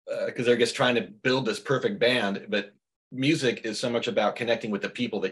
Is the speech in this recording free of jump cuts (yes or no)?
yes